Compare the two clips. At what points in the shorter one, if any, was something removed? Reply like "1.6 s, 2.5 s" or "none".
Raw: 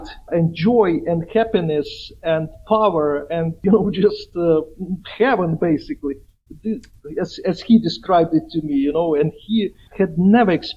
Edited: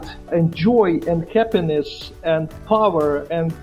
none